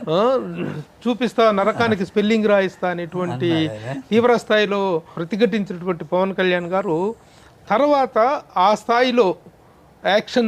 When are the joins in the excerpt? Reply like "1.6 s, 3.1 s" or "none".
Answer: 5.2 s